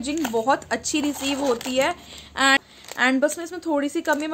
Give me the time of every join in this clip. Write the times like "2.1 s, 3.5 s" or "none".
2.6 s